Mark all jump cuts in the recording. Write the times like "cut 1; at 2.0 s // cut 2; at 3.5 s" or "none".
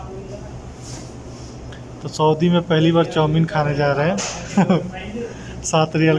none